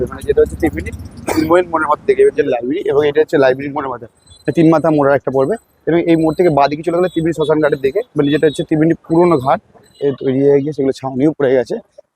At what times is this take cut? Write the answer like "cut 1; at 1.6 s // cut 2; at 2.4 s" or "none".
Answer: cut 1; at 2.5 s // cut 2; at 9.9 s